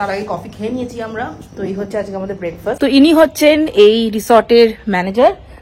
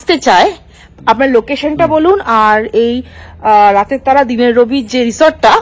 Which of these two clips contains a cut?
first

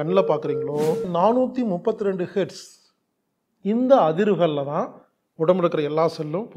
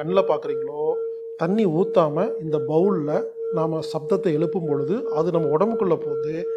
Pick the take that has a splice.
first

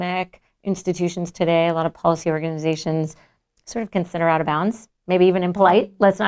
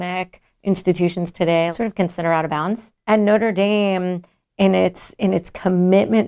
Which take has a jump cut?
second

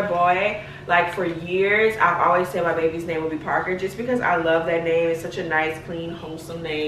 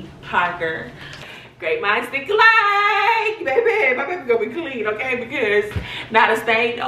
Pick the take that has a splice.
second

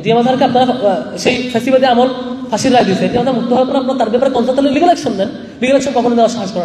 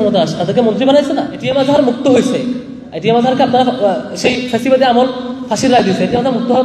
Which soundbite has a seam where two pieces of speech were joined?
second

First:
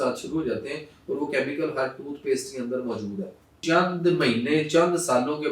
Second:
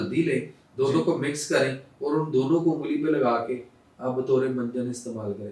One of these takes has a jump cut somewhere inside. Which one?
first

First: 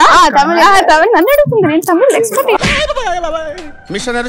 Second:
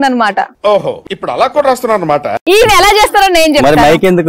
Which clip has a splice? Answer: second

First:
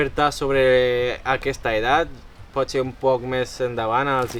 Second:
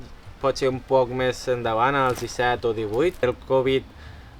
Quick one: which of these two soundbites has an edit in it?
second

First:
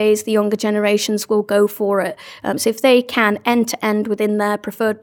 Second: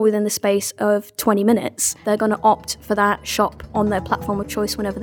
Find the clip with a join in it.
second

